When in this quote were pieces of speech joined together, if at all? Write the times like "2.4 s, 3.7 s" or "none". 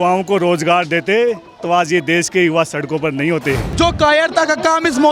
3.7 s